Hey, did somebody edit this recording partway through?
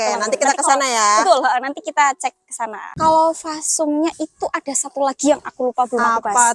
yes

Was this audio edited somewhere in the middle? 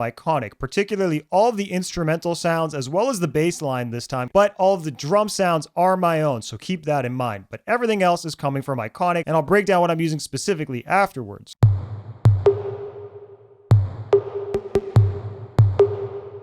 yes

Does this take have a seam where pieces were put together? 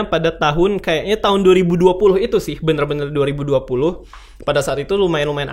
no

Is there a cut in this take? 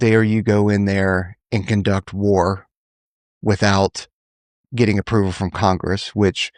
no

